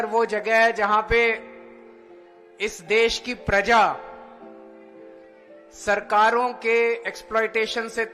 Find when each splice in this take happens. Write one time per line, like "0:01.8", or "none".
0:04.3
0:05.8